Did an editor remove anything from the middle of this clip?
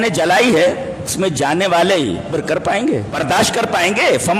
yes; 3 cuts; at 1.1 s, 2.3 s, 3.2 s

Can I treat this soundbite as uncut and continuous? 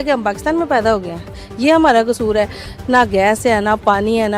no; 1 cut; at 2.6 s

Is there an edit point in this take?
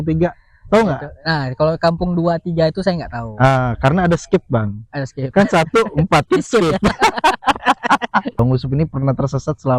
yes; 1 cut; at 8.4 s

